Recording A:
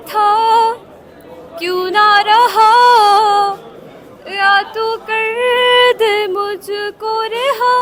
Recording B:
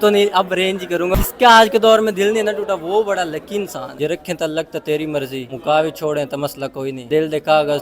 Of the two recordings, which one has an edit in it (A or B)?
B